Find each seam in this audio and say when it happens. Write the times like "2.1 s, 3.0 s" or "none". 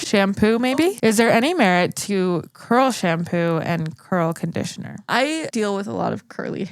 1.0 s, 5.3 s